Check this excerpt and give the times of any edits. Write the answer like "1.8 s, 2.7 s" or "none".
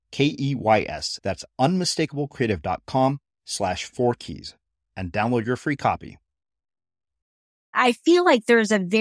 7.7 s